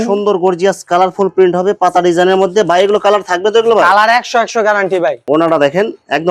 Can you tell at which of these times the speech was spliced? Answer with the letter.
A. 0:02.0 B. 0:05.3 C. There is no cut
B